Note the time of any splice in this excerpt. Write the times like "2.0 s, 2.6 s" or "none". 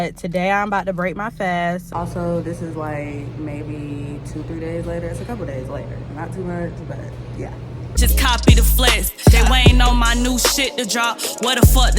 1.8 s, 7.9 s